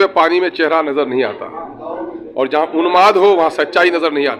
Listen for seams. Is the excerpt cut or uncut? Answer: uncut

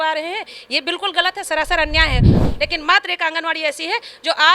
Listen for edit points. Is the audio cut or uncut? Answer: cut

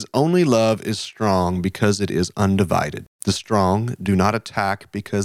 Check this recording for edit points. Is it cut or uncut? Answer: cut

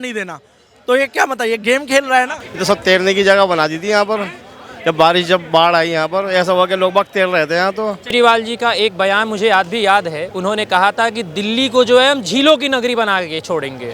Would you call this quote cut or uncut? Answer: cut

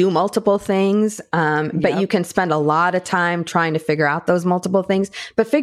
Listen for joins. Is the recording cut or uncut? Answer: uncut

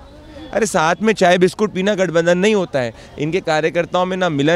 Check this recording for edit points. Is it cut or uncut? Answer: uncut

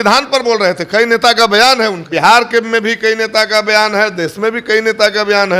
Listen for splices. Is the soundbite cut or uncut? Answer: cut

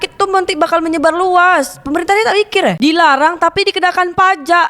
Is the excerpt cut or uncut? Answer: cut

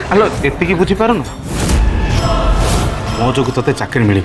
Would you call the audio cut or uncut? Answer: cut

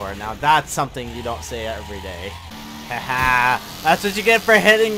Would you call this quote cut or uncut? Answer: cut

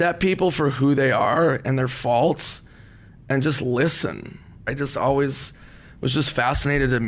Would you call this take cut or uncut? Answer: cut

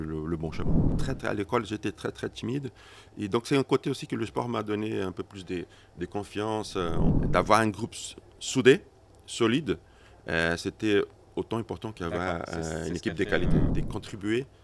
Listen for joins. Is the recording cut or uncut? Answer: cut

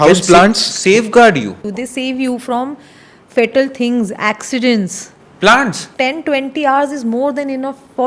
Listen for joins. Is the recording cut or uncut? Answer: cut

